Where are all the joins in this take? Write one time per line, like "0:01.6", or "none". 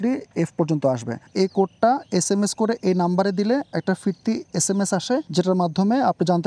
0:01.2
0:05.3